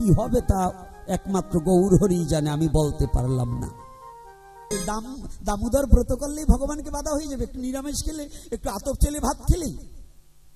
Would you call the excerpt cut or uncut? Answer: cut